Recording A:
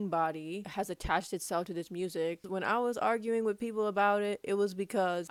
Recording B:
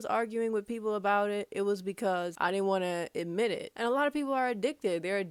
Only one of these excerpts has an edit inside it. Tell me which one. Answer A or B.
B